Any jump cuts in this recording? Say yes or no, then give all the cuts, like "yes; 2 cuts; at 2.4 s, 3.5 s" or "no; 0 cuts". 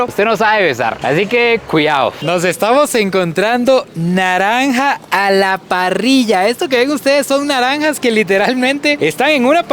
yes; 1 cut; at 2.2 s